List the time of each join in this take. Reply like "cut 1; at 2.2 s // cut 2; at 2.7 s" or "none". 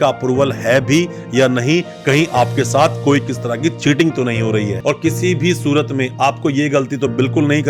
cut 1; at 4.7 s